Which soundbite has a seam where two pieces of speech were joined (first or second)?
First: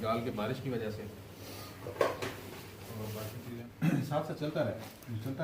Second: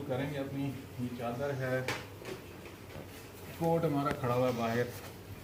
first